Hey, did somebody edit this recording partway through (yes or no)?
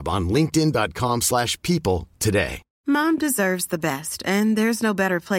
yes